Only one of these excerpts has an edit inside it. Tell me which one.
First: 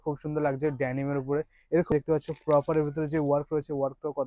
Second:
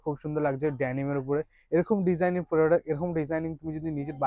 first; 1 cut; at 1.9 s

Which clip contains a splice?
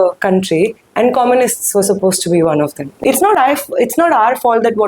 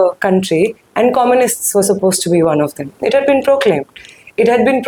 first; 1 cut; at 2.9 s

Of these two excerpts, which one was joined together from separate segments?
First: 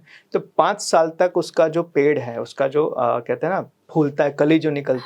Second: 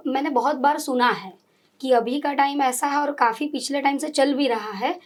first; 1 cut; at 3.8 s

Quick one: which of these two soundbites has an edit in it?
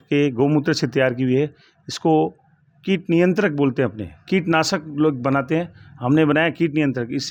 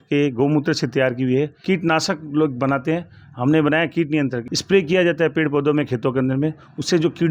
second; 2 cuts; at 1.6 s, 4.5 s

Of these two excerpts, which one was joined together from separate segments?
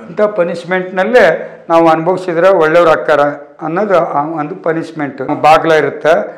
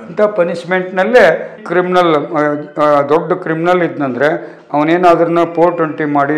second; 1 cut; at 1.6 s

